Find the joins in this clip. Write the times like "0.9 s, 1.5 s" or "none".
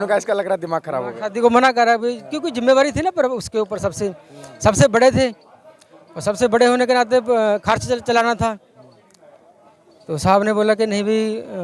none